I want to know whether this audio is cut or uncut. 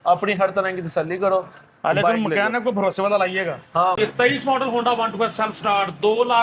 cut